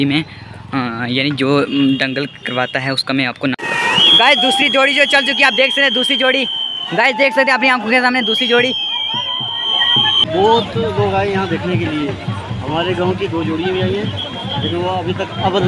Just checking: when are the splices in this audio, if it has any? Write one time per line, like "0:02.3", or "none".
0:03.6
0:10.2